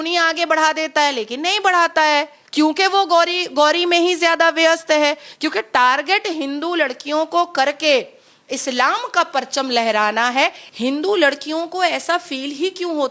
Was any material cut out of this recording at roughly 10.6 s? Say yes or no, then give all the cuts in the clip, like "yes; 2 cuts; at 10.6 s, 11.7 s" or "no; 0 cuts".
yes; 1 cut; at 10.6 s